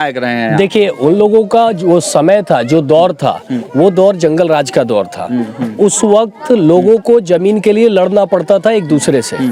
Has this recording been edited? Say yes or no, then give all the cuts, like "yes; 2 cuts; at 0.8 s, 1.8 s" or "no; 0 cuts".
no; 0 cuts